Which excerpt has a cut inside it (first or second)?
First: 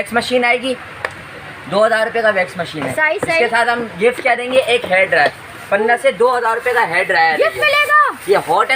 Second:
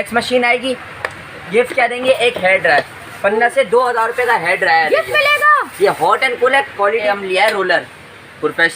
second